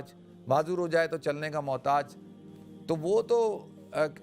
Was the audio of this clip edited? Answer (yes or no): no